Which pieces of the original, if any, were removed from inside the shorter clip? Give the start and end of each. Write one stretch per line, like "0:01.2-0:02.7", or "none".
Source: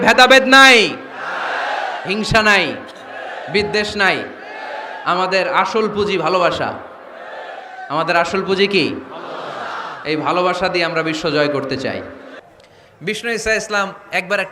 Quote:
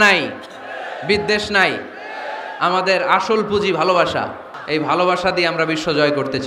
0:06.9-0:09.9